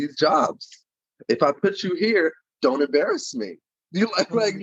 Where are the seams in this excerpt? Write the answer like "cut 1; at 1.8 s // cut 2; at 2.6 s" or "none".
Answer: none